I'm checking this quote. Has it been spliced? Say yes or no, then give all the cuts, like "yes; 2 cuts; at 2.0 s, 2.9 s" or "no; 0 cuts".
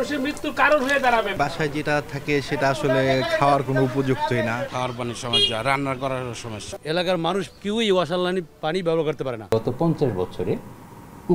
yes; 4 cuts; at 1.3 s, 4.7 s, 6.8 s, 9.5 s